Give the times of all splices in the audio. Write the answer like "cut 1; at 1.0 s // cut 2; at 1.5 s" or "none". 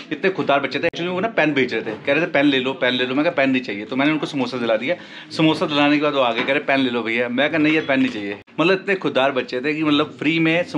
none